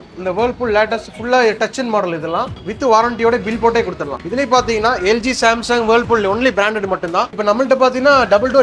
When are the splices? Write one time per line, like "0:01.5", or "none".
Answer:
0:02.6
0:04.2
0:07.4